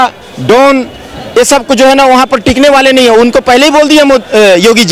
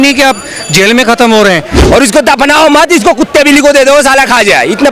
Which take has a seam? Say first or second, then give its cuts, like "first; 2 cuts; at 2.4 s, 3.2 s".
second; 1 cut; at 1.7 s